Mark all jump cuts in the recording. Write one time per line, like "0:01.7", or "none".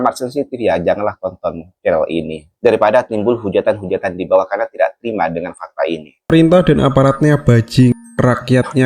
0:06.3

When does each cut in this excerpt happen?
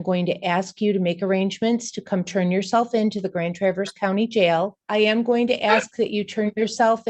0:04.8

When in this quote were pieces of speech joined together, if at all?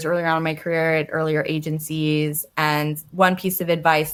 none

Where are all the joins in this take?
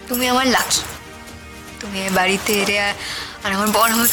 none

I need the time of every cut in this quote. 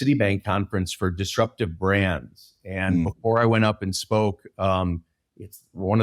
none

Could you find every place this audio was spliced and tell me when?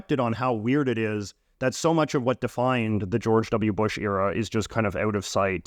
none

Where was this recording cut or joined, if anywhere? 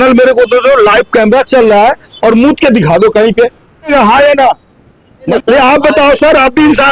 0:03.9
0:05.3

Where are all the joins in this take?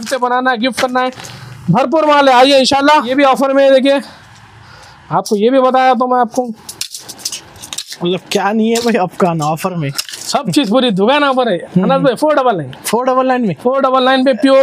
0:03.1

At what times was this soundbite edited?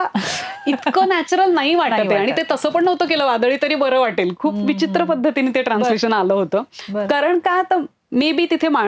none

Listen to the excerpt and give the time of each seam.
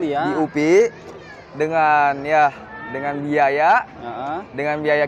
none

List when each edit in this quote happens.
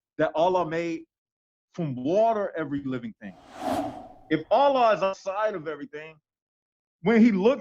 0:03.6

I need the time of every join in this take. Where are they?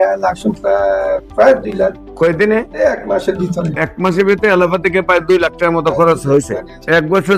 none

